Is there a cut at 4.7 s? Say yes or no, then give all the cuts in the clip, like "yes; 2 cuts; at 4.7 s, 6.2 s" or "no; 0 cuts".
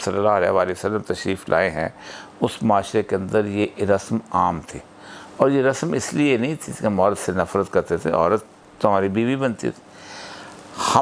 no; 0 cuts